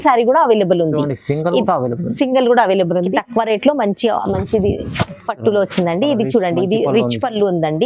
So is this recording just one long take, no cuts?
no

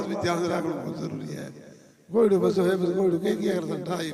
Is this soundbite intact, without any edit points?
yes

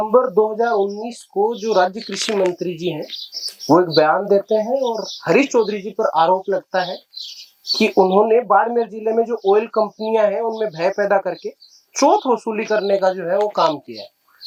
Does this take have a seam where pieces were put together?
no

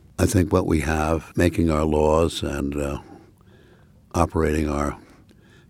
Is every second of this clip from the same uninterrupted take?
no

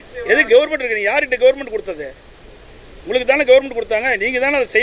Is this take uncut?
yes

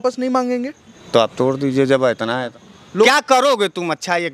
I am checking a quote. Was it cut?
yes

